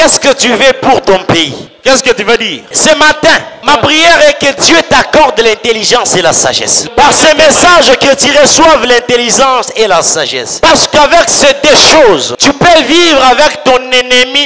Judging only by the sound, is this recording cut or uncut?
cut